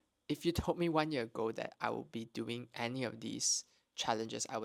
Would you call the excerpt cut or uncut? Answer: uncut